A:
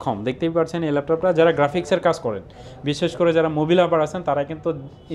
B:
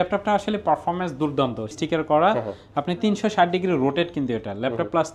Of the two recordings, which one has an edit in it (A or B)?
B